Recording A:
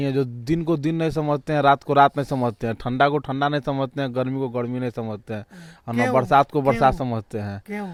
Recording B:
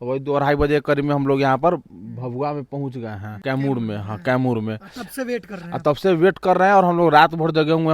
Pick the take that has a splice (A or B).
B